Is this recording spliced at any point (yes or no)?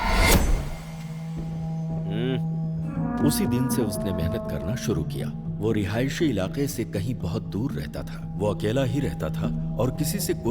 yes